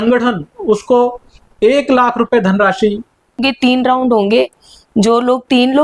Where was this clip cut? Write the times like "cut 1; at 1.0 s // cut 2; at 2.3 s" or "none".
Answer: cut 1; at 3.4 s